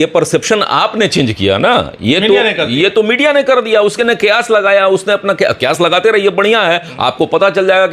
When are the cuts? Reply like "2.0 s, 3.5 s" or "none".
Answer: none